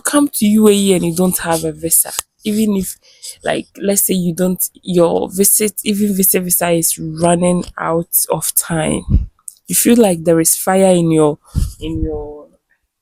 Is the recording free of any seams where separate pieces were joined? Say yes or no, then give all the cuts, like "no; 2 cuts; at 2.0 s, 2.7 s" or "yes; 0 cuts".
yes; 0 cuts